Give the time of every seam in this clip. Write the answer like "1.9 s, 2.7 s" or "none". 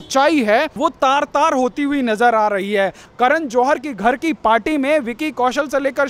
3.0 s